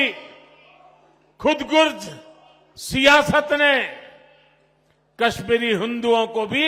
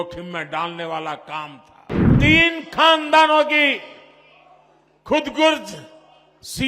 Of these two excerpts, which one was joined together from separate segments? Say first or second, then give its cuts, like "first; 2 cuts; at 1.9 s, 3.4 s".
second; 1 cut; at 2.1 s